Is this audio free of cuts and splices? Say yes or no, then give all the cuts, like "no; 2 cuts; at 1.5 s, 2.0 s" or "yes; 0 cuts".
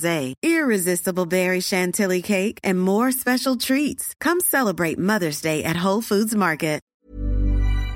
no; 1 cut; at 6.9 s